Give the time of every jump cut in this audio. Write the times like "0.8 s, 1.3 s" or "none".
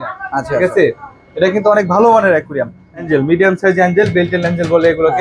3.1 s